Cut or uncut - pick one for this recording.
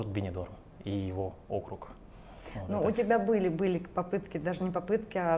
uncut